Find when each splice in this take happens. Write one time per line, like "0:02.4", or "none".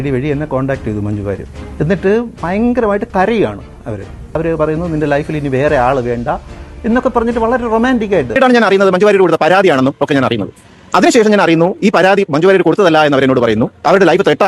0:08.4